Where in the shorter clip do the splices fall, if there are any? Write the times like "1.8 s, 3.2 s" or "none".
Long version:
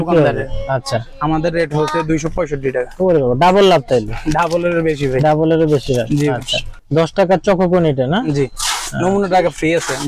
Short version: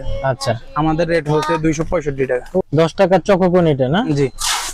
2.6 s

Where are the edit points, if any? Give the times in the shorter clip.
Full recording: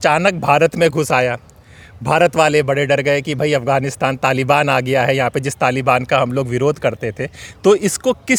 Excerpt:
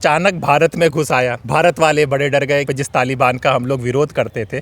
1.4 s, 2.7 s

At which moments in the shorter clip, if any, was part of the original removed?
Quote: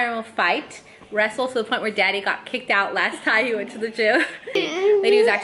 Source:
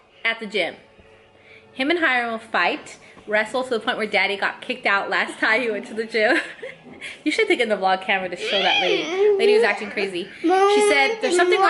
4.5 s

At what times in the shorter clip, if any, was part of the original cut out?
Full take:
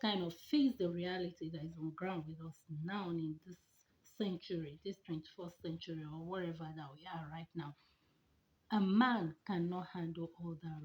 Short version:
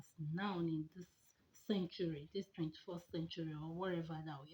none

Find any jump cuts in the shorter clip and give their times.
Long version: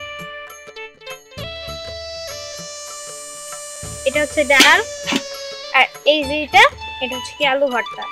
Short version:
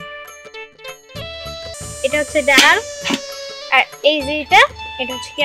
1.7 s

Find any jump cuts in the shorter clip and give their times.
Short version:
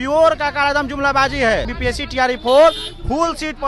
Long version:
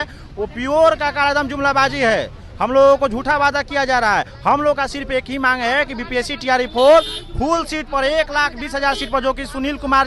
1.7 s

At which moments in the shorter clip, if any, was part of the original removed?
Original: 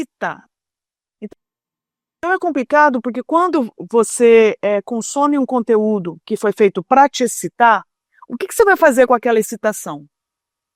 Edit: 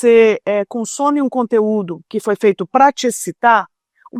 none

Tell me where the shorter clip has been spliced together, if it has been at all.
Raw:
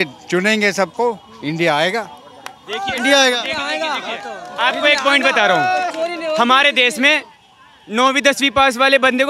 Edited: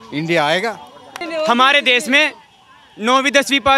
1.3 s

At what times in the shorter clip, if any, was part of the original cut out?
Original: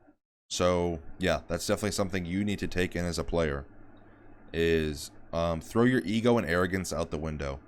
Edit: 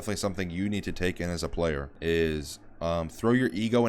1.9 s

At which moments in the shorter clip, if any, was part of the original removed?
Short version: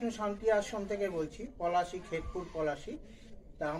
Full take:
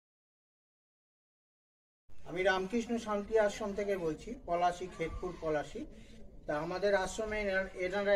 none

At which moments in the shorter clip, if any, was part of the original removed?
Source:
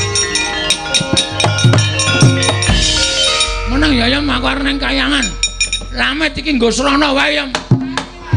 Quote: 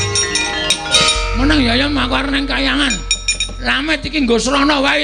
0.9 s

